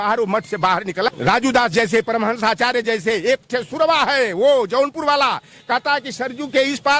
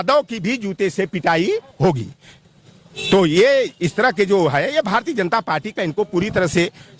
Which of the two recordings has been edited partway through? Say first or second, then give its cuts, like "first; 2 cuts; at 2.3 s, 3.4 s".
first; 1 cut; at 1.2 s